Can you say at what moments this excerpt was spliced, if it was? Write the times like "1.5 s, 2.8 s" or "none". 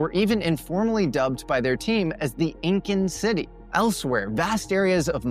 none